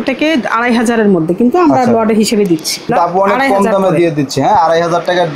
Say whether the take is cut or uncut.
cut